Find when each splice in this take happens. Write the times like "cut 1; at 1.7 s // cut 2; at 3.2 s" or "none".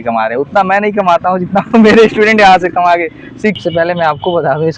cut 1; at 3.6 s